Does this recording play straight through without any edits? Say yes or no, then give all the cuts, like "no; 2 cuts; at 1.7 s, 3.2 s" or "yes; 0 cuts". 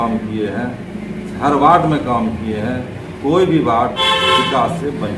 yes; 0 cuts